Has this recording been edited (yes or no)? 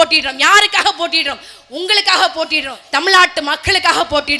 yes